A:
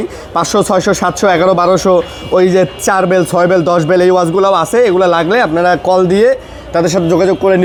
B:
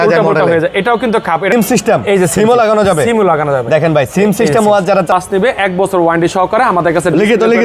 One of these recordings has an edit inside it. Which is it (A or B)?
B